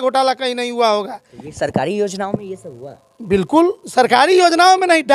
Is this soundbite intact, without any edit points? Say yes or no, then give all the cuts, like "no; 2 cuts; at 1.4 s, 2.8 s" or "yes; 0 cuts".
yes; 0 cuts